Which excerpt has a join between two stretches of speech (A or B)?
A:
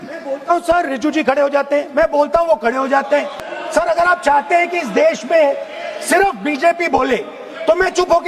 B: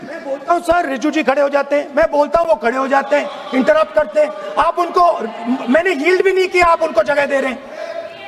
A